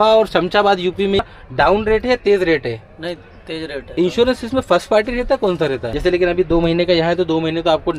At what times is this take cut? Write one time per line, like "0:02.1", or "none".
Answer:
0:01.2
0:04.0
0:05.9